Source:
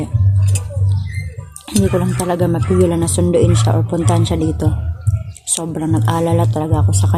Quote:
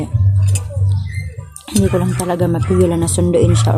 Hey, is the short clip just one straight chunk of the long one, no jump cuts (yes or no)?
yes